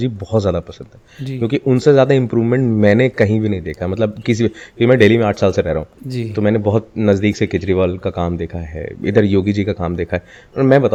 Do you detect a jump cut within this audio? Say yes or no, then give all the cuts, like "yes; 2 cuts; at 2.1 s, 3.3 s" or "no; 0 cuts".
no; 0 cuts